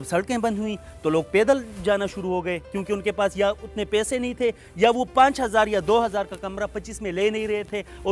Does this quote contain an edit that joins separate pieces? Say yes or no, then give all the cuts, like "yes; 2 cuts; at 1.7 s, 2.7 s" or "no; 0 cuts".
no; 0 cuts